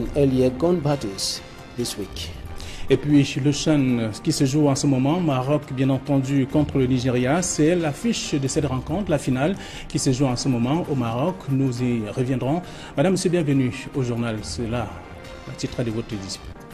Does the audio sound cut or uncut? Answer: uncut